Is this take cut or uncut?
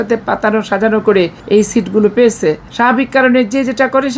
cut